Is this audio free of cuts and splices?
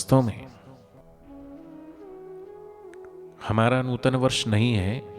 no; 1 cut; at 1.0 s

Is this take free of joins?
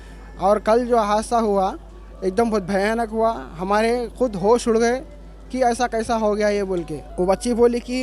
no; 1 cut; at 7.0 s

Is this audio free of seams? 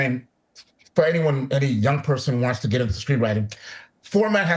yes; 0 cuts

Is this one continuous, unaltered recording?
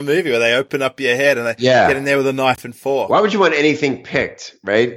yes; 0 cuts

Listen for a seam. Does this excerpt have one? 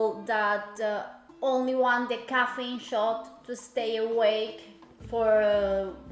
no; 0 cuts

